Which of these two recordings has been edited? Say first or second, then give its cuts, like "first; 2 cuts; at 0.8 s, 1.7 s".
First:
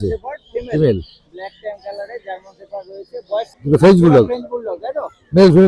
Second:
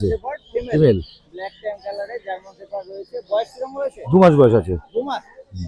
first; 1 cut; at 3.5 s